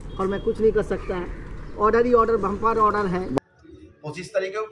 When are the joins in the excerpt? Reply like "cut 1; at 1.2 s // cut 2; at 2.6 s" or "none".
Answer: cut 1; at 3.4 s